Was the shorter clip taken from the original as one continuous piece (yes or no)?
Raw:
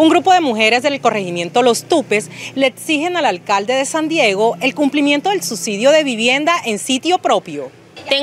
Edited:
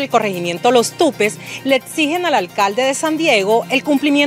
yes